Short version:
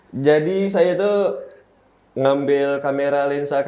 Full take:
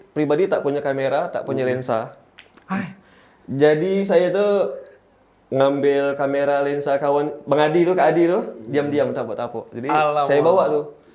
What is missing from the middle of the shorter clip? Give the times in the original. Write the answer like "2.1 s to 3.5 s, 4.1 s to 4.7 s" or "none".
none